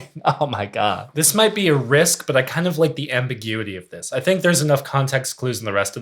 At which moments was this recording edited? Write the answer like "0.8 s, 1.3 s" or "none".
1.0 s